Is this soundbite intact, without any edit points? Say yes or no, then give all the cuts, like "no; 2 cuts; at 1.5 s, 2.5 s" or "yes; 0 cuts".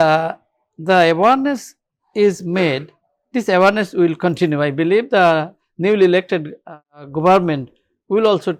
yes; 0 cuts